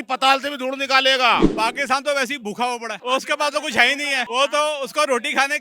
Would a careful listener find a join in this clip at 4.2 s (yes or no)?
yes